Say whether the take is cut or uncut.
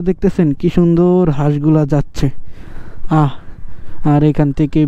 uncut